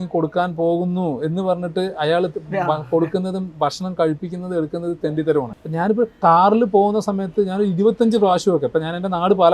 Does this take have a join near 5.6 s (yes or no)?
yes